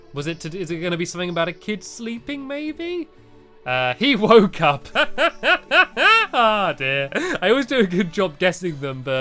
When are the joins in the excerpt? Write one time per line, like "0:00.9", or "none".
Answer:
none